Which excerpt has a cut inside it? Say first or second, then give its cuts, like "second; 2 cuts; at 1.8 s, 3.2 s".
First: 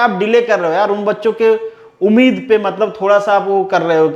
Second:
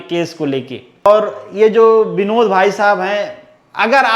second; 1 cut; at 1.1 s